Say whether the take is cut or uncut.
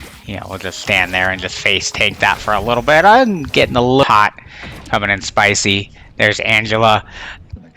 cut